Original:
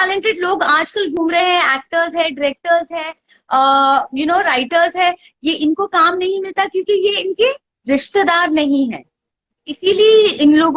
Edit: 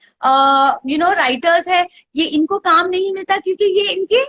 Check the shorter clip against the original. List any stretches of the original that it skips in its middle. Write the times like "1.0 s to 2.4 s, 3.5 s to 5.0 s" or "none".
none